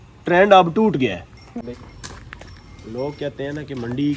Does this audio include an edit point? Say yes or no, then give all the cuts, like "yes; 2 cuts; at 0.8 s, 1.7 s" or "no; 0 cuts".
yes; 1 cut; at 1.5 s